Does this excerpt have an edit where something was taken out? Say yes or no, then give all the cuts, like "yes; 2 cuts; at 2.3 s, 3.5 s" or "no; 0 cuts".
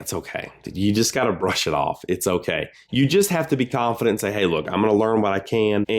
yes; 1 cut; at 2.9 s